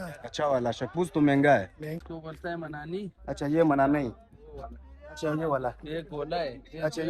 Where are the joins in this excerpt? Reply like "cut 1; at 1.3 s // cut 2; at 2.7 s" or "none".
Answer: cut 1; at 2.0 s